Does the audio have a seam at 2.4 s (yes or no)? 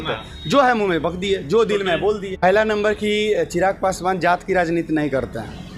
yes